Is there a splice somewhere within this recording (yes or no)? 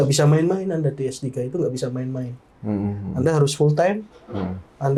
no